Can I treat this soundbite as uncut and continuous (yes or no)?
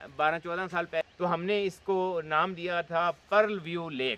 no